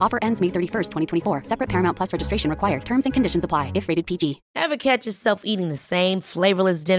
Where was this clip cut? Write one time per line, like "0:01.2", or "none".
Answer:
0:04.5